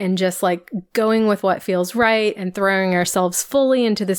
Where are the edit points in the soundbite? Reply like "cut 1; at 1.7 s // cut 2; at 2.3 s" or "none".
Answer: none